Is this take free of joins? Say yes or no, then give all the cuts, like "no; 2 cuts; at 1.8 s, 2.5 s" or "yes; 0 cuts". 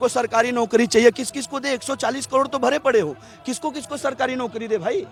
yes; 0 cuts